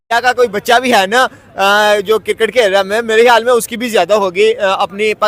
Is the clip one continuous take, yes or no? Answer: yes